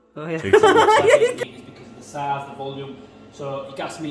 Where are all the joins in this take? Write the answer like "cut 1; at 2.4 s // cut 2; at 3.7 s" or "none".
cut 1; at 1.4 s